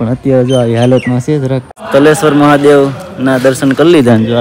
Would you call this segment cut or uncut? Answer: cut